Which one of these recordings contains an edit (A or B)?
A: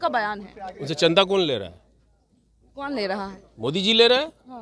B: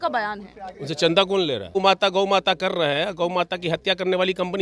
B